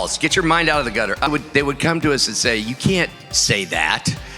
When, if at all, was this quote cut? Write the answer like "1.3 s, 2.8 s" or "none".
1.3 s